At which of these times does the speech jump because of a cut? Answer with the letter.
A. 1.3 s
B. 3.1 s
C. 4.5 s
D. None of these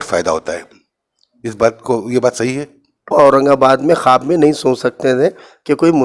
B